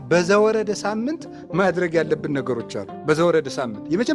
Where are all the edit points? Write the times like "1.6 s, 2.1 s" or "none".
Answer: none